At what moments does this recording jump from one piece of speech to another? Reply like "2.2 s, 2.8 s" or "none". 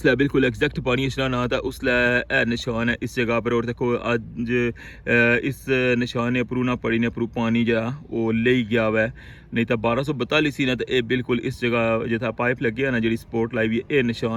none